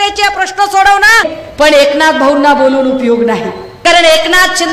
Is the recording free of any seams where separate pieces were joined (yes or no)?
no